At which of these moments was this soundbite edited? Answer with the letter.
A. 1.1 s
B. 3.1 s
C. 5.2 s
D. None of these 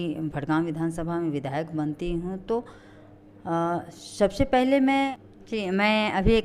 C